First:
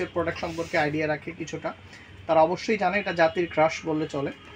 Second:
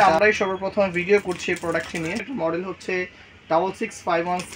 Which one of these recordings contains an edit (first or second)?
second